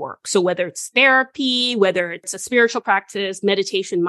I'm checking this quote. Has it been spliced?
yes; 1 cut; at 2.3 s

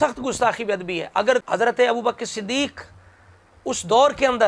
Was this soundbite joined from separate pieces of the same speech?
yes; 1 cut; at 1.5 s

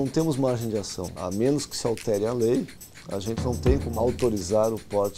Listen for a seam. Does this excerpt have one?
yes; 2 cuts; at 1.1 s, 3.9 s

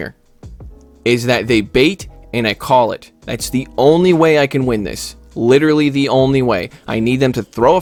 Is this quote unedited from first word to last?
yes; 0 cuts

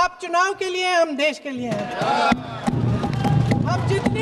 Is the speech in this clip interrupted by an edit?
yes; 1 cut; at 3.1 s

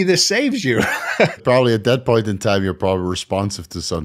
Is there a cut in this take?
yes; 1 cut; at 1.4 s

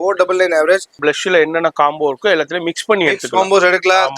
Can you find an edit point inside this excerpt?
yes; 1 cut; at 1.0 s

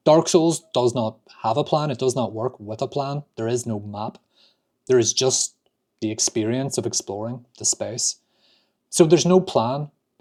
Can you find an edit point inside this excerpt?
no; 0 cuts

